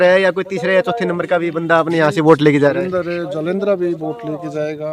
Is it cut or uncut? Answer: uncut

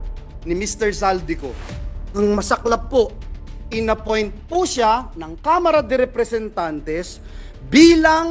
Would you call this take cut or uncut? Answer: uncut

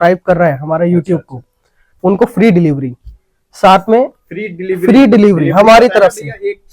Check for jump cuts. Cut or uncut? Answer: uncut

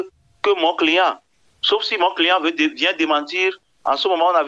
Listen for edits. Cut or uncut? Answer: uncut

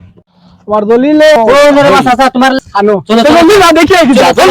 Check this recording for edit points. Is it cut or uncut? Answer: cut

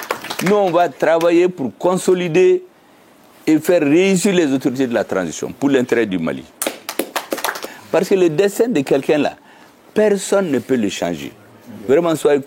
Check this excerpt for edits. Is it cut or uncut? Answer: cut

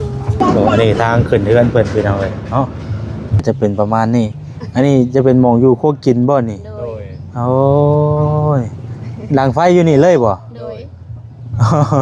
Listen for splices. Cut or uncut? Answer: cut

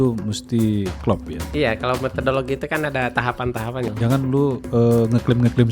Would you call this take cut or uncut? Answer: cut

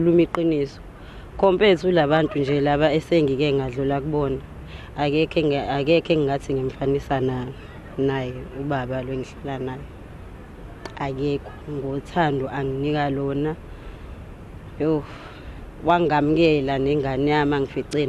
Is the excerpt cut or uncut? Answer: uncut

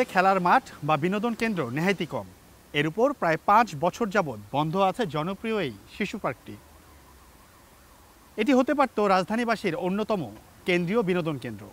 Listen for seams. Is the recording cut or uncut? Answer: uncut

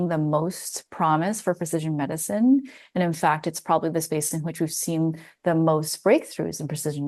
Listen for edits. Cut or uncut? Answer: uncut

